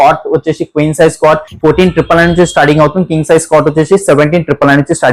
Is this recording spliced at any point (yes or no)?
no